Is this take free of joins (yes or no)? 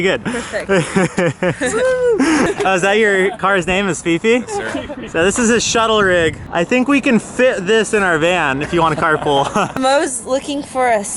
no